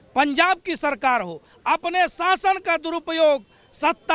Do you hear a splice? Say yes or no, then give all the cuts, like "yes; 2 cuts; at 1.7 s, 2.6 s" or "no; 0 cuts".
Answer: yes; 1 cut; at 1.5 s